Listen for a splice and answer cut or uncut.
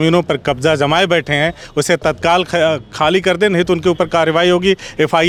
uncut